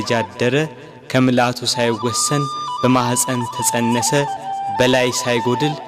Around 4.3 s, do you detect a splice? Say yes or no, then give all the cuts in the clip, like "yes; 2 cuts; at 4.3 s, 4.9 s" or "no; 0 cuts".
no; 0 cuts